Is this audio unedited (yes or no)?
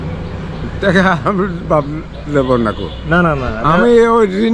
yes